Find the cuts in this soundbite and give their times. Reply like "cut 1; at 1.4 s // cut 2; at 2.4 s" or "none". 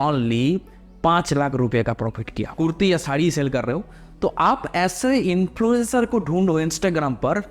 cut 1; at 2.5 s